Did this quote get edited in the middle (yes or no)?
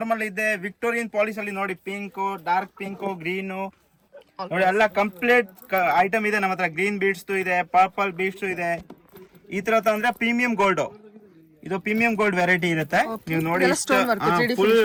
no